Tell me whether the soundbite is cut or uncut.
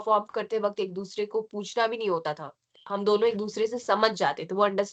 uncut